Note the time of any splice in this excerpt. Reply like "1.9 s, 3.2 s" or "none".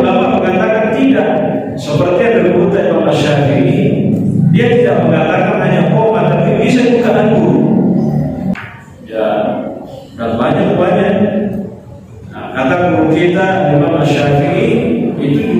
8.5 s